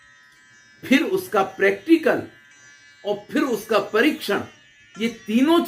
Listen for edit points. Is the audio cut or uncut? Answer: uncut